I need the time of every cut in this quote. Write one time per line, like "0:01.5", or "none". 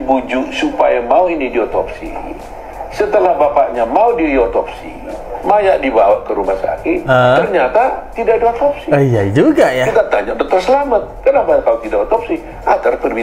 none